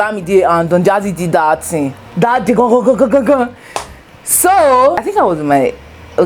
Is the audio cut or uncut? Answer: uncut